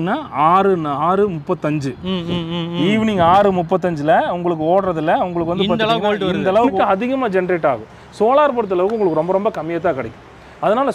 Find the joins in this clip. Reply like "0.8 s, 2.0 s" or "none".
6.7 s